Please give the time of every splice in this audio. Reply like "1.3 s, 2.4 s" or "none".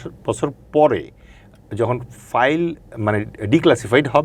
none